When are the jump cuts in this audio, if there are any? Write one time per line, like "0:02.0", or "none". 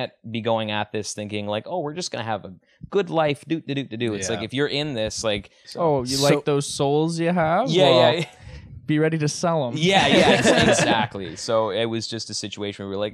0:05.6